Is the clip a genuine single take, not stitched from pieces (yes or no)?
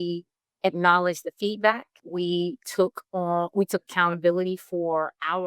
no